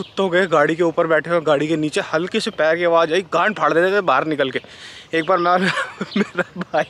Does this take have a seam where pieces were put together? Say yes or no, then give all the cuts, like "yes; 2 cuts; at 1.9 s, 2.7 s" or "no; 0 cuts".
no; 0 cuts